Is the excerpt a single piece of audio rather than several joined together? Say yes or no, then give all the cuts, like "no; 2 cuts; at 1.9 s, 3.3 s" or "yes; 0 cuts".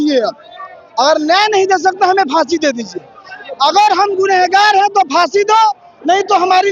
yes; 0 cuts